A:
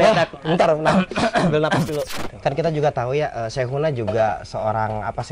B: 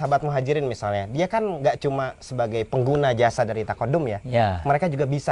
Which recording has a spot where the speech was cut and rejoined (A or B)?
A